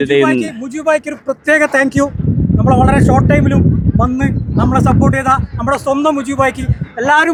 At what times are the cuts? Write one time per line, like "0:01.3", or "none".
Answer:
none